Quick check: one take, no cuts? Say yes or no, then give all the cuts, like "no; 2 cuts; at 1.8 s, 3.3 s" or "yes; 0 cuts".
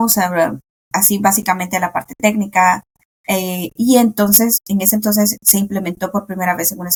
yes; 0 cuts